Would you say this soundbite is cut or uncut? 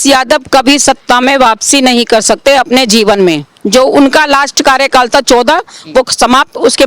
uncut